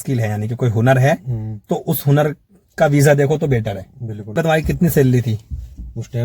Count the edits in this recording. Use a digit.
1